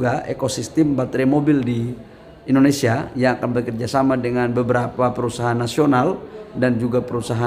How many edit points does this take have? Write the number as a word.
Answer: zero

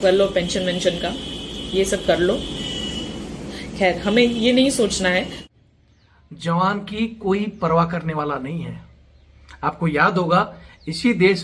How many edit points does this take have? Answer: one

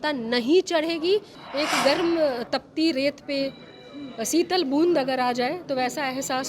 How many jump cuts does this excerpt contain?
one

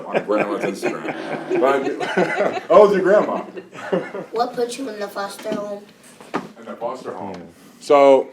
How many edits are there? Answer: one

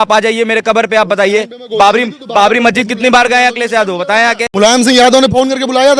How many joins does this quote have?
zero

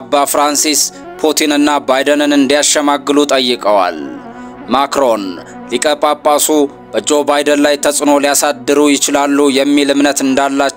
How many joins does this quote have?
zero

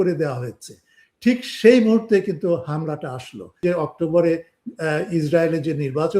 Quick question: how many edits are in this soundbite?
one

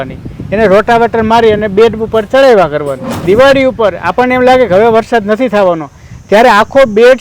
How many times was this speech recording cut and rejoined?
one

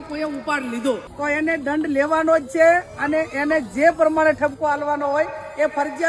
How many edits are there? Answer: one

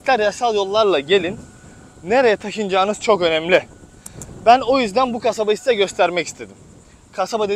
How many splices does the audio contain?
zero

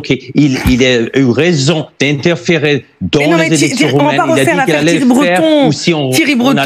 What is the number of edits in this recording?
zero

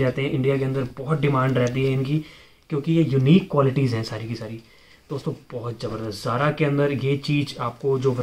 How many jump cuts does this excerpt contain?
zero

